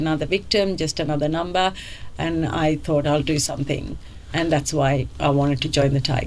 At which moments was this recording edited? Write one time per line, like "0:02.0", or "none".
none